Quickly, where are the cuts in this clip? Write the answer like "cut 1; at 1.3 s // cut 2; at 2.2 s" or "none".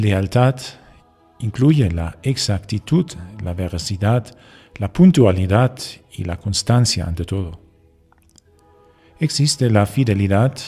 none